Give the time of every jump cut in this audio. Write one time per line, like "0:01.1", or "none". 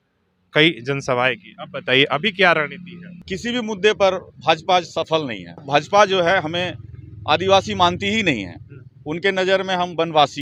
0:03.3
0:05.6